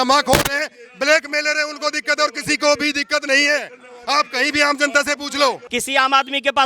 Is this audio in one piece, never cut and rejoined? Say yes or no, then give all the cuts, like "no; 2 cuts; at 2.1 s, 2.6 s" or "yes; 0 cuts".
no; 1 cut; at 5.6 s